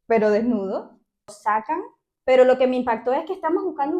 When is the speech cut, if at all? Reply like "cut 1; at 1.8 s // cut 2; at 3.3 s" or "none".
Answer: cut 1; at 1.3 s